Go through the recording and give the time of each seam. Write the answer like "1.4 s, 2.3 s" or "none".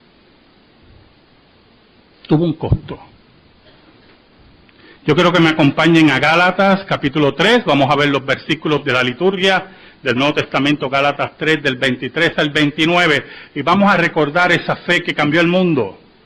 9.4 s